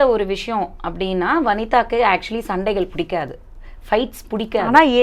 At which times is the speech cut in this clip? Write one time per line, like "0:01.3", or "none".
none